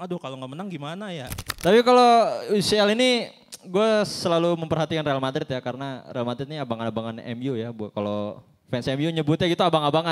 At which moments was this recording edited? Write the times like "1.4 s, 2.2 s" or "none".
1.4 s